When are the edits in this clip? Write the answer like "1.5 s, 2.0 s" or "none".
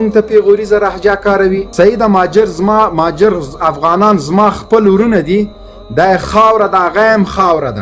none